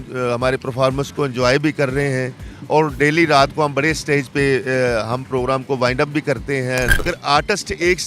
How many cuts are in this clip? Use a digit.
1